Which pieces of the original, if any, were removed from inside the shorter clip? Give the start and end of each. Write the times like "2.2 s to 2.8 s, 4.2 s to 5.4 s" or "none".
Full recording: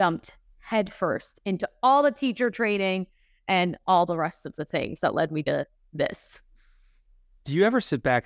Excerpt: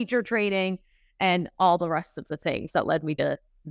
none